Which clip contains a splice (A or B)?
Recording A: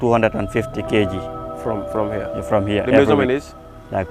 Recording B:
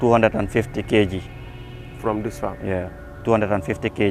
A